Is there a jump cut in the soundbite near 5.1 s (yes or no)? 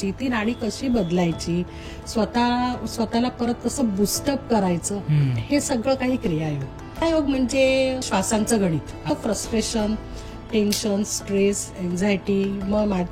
no